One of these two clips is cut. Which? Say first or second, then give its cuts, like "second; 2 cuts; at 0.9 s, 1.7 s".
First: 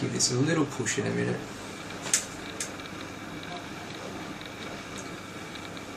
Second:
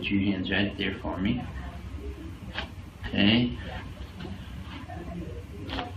second; 1 cut; at 3.1 s